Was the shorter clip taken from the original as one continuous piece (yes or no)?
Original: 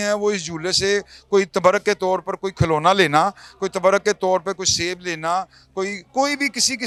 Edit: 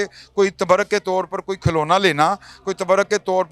yes